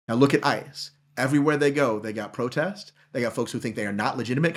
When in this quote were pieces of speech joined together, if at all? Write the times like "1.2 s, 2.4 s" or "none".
none